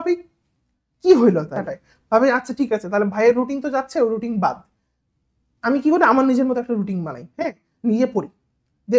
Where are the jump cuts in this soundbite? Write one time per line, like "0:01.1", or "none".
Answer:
0:01.9